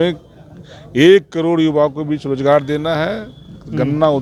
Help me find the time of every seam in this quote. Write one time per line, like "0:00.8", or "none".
none